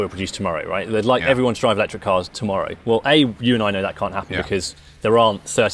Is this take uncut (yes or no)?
yes